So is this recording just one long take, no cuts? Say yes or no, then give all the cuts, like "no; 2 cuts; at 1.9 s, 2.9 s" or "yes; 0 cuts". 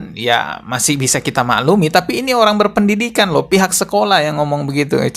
yes; 0 cuts